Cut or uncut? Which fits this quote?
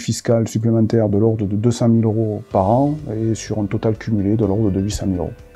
uncut